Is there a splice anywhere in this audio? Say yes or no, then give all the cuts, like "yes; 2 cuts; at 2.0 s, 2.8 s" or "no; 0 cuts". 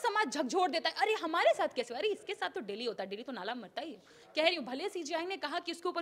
yes; 1 cut; at 4.2 s